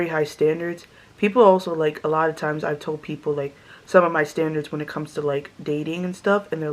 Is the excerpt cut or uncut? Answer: uncut